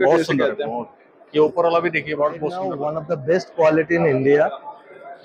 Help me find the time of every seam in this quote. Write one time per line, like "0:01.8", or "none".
0:02.8